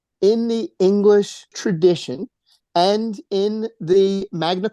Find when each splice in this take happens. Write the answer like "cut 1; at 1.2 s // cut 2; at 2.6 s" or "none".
cut 1; at 1.5 s